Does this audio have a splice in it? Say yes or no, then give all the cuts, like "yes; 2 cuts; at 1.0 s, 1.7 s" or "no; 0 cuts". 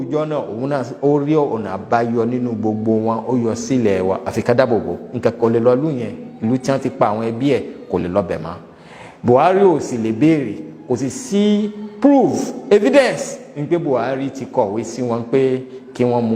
no; 0 cuts